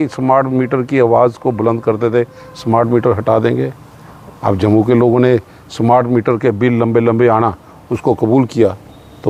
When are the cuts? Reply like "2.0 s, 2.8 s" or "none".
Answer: none